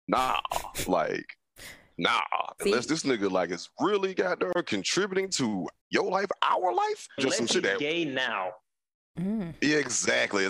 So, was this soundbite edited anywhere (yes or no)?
yes